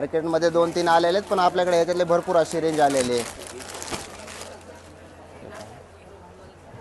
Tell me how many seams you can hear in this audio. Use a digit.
0